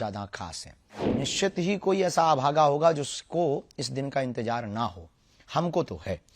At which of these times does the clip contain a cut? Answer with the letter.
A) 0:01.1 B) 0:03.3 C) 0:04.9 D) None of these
A